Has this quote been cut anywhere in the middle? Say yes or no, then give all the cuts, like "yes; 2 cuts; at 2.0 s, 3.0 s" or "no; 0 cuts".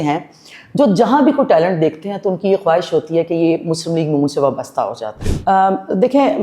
yes; 1 cut; at 5.2 s